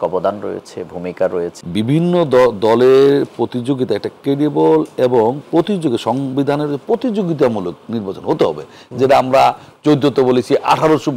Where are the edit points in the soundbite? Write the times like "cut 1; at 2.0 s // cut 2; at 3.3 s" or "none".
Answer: cut 1; at 1.5 s